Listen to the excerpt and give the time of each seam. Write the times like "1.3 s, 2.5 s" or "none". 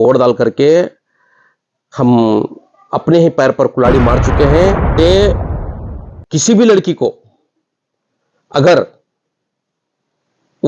4.9 s